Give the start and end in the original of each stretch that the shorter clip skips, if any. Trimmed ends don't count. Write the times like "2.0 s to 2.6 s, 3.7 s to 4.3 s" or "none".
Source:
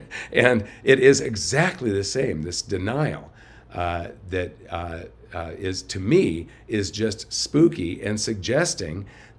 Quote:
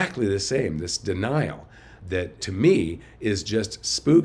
3.7 s to 5.6 s